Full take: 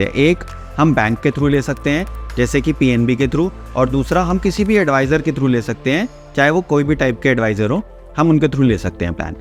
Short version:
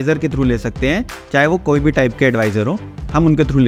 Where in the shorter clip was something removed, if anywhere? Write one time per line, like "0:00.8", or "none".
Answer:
none